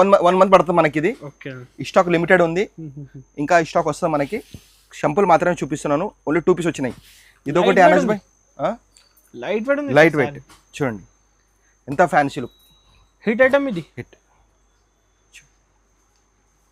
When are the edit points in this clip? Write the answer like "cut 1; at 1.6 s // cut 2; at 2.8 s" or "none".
none